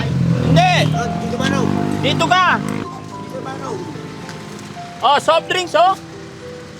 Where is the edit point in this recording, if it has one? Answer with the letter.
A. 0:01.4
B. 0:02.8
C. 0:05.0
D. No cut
B